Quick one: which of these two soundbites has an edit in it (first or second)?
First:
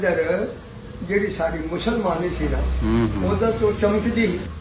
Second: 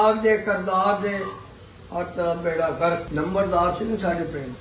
second